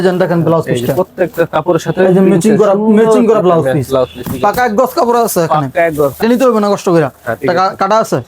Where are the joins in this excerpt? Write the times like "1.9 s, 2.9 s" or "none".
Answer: 6.2 s